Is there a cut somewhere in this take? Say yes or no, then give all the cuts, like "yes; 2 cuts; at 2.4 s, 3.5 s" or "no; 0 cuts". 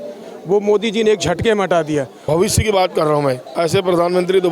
yes; 2 cuts; at 2.1 s, 3.5 s